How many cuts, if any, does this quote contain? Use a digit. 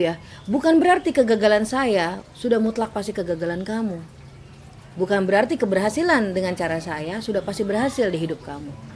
0